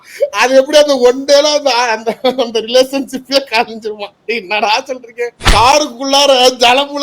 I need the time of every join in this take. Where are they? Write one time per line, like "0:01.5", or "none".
0:05.4